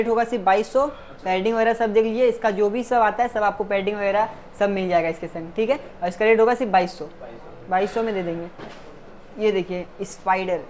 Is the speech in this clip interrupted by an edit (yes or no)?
no